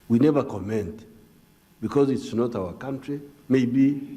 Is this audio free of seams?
no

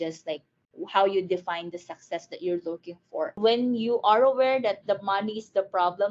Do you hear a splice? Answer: yes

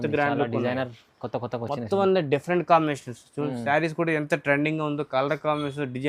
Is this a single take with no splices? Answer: yes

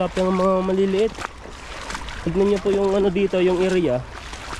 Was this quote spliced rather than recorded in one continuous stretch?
no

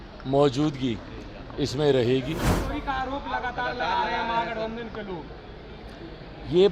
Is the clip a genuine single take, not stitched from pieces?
no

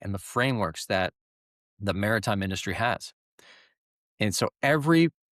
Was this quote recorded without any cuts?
yes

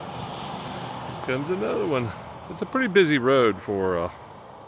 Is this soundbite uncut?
yes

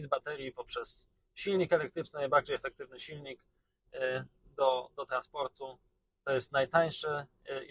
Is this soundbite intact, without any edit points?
yes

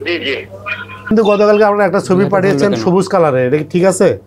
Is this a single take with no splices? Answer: no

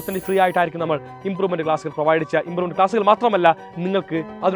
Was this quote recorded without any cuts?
yes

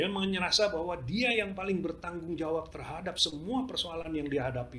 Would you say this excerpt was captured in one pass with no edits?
yes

